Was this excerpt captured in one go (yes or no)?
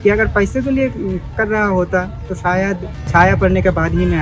no